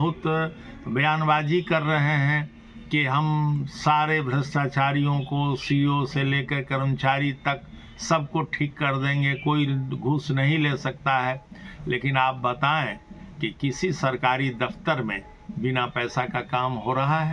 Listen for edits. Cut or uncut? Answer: uncut